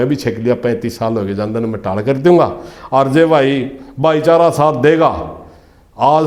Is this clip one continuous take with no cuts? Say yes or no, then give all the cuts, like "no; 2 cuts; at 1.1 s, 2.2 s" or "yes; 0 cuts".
yes; 0 cuts